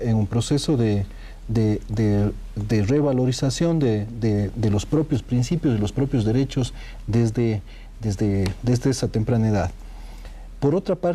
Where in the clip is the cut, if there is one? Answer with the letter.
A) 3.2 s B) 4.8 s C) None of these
B